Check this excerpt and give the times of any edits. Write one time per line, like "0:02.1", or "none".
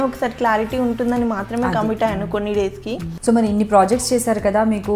0:03.1